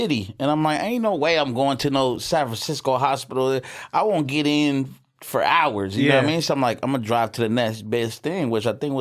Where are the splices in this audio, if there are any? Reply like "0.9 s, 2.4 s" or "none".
none